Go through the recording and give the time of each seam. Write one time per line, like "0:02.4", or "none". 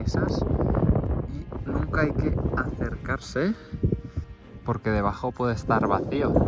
0:04.2